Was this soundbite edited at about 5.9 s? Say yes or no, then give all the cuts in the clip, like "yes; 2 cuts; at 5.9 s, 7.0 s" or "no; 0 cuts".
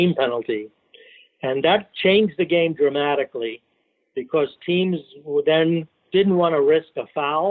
yes; 1 cut; at 5.9 s